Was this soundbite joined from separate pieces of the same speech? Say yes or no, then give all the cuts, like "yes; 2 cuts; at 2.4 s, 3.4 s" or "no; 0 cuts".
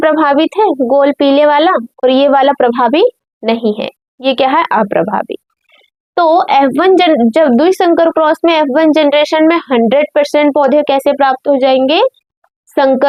no; 0 cuts